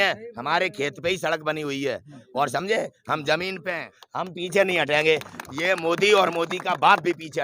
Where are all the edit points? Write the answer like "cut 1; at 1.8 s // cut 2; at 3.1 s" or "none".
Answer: cut 1; at 4.0 s